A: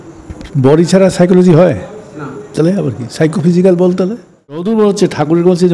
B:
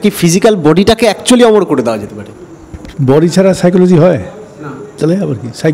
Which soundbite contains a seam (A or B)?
A